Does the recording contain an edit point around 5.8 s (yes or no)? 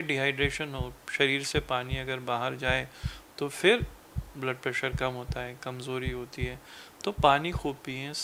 no